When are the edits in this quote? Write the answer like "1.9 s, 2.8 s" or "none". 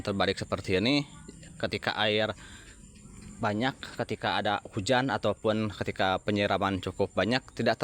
none